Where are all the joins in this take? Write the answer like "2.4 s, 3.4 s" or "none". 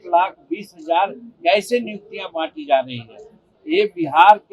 3.5 s